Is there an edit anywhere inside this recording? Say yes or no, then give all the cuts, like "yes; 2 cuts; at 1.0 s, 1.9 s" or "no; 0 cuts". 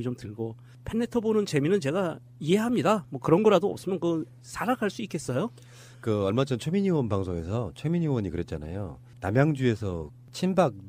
yes; 1 cut; at 3.2 s